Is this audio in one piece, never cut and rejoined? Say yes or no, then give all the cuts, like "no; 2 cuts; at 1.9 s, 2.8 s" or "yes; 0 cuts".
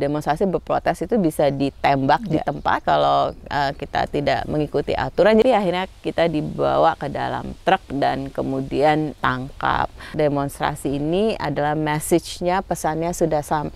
no; 2 cuts; at 5.4 s, 9.9 s